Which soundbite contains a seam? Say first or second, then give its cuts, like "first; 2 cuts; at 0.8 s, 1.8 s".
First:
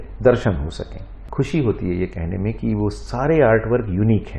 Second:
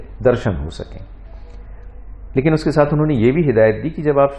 first; 1 cut; at 1.2 s